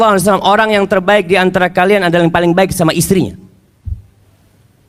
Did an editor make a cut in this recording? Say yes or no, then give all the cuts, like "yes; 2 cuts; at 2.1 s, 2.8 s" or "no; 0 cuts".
no; 0 cuts